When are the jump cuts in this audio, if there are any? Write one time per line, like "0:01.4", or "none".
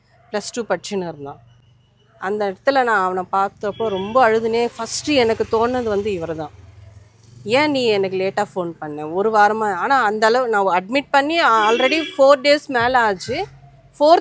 none